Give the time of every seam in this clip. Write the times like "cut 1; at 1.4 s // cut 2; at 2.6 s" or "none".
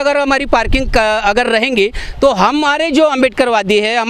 none